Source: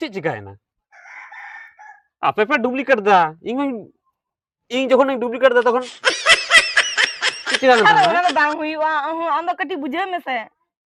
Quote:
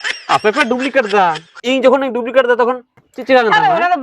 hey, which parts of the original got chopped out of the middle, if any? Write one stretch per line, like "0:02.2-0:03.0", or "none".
0:03.4-0:04.5
0:06.0-0:07.3